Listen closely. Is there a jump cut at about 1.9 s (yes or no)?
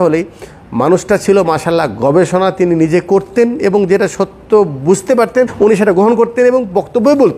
no